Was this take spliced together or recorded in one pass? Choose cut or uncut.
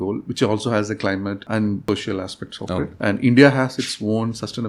cut